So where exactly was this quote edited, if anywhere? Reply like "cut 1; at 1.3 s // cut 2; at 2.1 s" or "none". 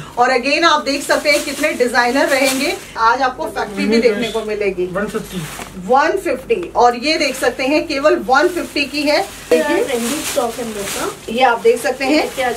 cut 1; at 2.9 s // cut 2; at 9.5 s